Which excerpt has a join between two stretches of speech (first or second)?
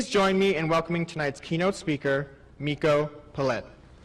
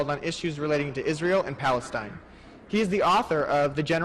first